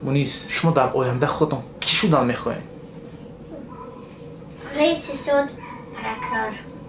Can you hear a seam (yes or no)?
no